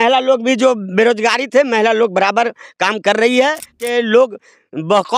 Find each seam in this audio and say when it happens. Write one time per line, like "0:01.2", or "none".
0:03.8